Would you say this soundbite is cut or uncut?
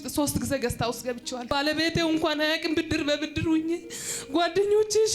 cut